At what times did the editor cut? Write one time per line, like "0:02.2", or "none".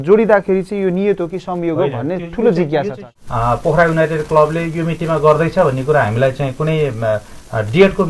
0:03.0

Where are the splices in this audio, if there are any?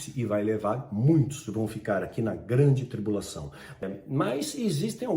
0:03.8

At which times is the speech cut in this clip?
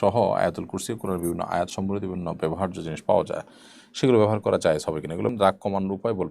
0:05.3

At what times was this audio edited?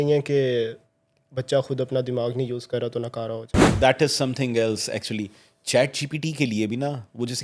0:03.7

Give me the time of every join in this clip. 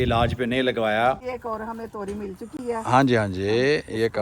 0:01.3

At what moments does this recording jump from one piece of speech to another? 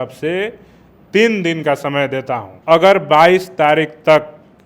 0:02.5

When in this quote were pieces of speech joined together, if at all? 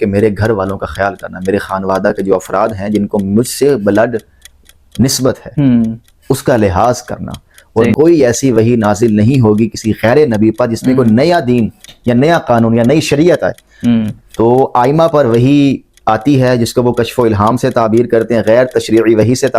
0:07.9

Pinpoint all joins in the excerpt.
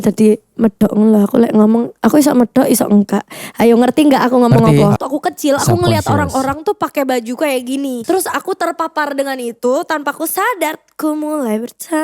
0:05.0
0:08.0

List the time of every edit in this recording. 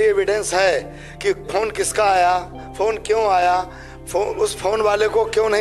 none

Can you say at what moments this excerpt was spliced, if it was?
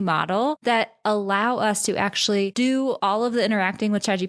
none

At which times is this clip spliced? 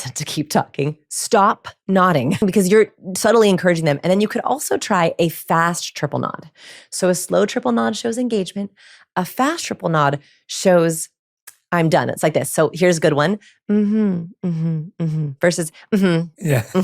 0:02.4

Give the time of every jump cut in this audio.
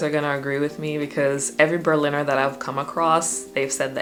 none

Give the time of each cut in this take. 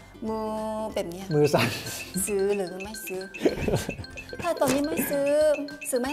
none

